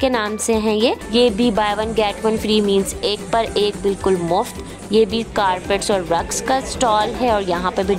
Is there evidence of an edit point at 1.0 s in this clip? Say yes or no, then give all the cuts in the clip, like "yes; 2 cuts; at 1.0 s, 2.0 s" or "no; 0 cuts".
yes; 1 cut; at 1.0 s